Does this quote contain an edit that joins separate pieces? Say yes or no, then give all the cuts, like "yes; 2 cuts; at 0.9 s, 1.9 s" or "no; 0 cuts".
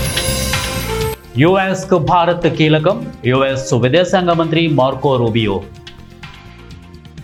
no; 0 cuts